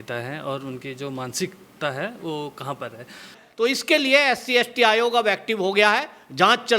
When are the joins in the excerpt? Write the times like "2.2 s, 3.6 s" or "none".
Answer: 3.4 s